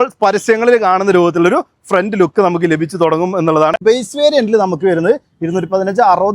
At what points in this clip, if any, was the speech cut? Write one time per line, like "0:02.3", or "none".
0:03.8